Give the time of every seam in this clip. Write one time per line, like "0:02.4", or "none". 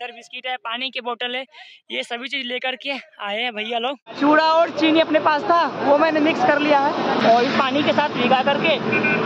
0:04.2
0:07.2